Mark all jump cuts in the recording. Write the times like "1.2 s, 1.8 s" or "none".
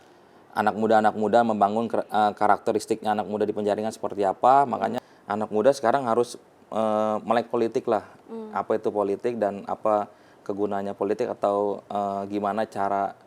5.0 s